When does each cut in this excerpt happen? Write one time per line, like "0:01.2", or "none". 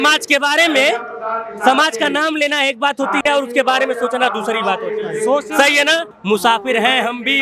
0:06.1